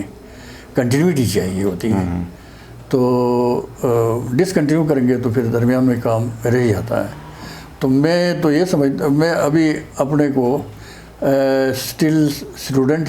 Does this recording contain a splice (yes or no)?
no